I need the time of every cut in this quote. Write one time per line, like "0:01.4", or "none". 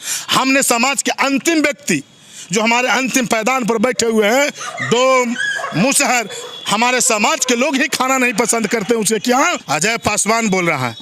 0:09.6